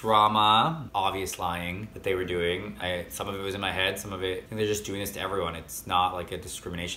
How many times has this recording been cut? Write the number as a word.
three